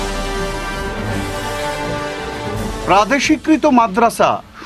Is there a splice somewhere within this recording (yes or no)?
yes